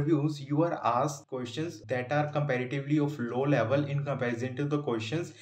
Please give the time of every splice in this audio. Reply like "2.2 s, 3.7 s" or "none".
1.4 s